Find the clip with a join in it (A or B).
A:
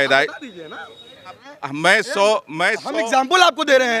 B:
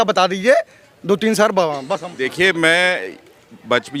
A